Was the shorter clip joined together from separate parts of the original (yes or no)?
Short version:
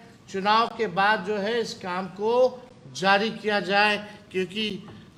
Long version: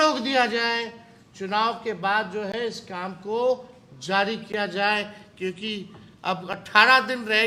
no